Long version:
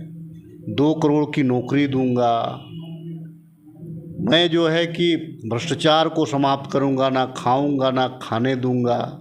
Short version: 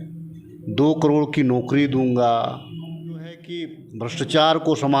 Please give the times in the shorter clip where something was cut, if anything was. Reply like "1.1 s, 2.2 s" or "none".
3.8 s